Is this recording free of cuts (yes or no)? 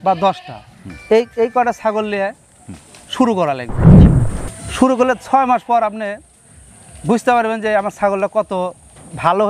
yes